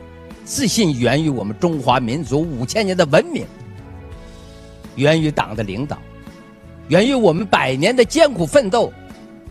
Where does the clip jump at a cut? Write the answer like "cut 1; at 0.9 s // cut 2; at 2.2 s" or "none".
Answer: cut 1; at 3.5 s // cut 2; at 4.9 s